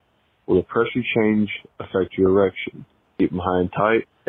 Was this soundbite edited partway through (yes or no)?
no